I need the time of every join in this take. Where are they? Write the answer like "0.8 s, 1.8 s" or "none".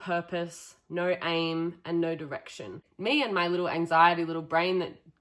2.9 s